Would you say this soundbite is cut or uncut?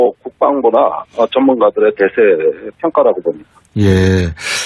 uncut